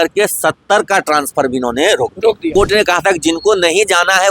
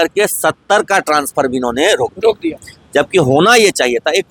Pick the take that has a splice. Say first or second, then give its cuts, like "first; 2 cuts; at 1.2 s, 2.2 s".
first; 1 cut; at 2.5 s